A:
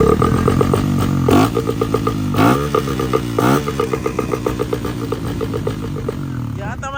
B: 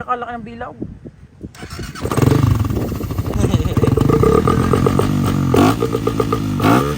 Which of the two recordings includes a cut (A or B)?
B